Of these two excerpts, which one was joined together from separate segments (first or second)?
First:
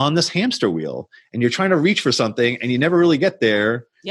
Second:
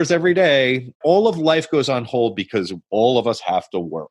second